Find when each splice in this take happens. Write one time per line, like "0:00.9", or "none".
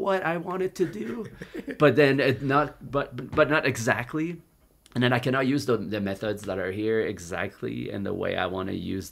none